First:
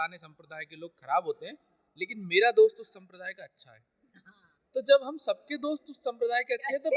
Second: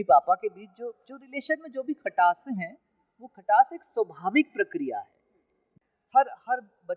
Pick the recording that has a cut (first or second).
second